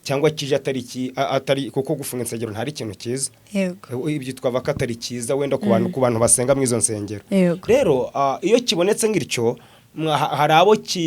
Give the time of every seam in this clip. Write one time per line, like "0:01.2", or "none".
none